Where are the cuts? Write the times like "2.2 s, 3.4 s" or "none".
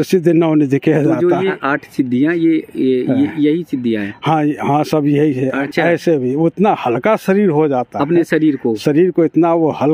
1.6 s, 5.6 s